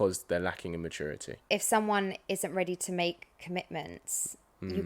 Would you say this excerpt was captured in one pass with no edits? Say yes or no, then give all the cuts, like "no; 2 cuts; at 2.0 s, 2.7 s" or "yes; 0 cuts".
no; 1 cut; at 1.3 s